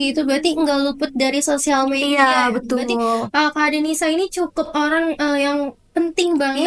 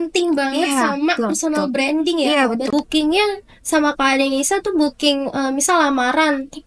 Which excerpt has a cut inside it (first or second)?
second